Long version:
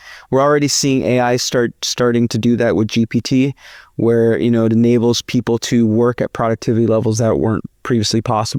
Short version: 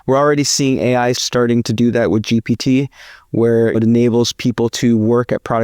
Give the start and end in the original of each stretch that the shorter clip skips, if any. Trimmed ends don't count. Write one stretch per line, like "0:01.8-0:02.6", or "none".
0:01.4-0:01.9
0:04.4-0:04.6